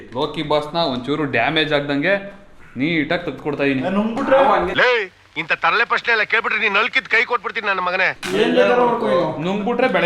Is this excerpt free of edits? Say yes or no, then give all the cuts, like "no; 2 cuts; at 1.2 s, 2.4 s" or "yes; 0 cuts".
yes; 0 cuts